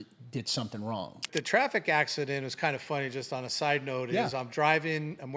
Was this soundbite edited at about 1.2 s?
yes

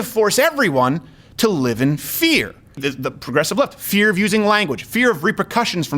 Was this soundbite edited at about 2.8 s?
yes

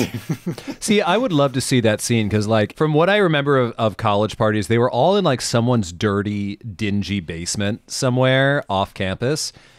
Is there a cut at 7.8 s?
no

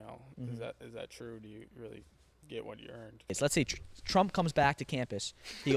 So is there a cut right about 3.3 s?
yes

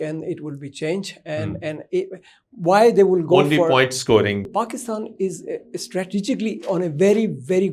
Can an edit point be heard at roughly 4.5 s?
yes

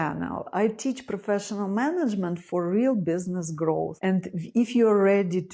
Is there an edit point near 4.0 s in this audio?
no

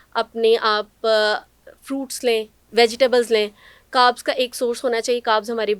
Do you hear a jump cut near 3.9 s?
no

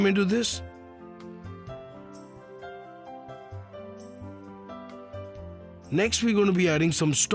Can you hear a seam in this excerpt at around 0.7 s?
yes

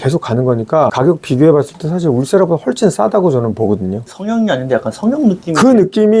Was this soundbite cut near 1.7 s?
no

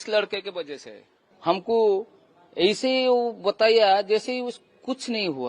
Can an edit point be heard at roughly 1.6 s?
yes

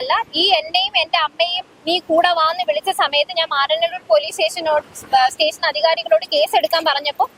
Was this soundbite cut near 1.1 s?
no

